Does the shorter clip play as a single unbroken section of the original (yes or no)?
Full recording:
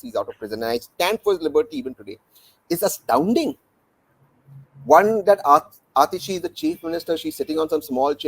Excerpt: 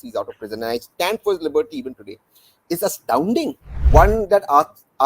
no